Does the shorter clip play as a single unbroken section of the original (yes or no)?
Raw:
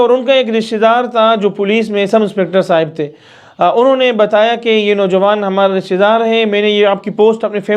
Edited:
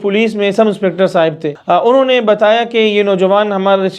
no